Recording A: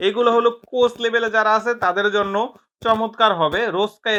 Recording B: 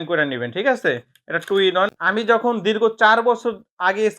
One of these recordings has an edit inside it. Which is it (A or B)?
B